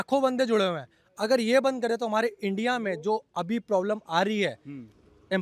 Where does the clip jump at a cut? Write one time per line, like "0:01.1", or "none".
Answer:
none